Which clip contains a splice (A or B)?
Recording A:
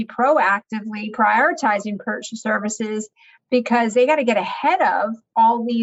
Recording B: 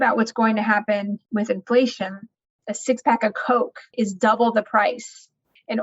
B